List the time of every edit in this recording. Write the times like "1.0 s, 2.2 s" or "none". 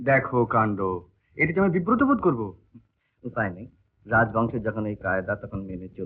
none